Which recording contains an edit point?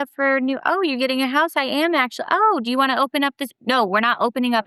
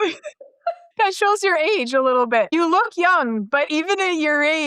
second; 3 cuts; at 0.8 s, 2.5 s, 3.7 s

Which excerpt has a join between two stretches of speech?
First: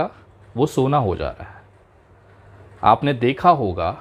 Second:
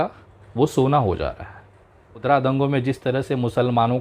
second; 1 cut; at 2.2 s

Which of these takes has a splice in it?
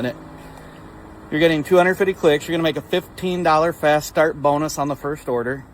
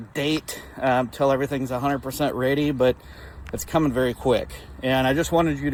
first; 1 cut; at 4.7 s

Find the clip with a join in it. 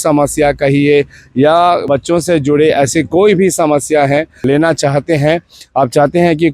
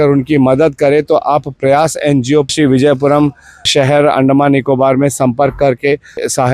first; 1 cut; at 4.4 s

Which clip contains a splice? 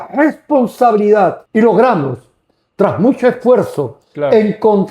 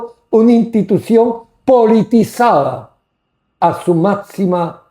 first; 1 cut; at 1.4 s

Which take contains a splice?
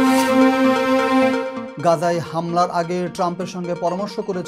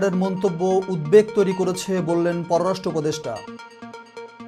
first; 1 cut; at 1.5 s

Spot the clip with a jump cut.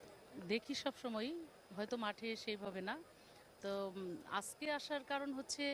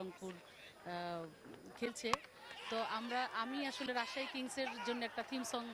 first; 1 cut; at 4.7 s

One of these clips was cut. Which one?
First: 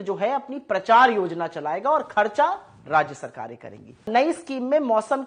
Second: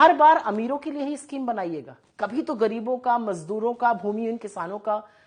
first; 1 cut; at 4.1 s

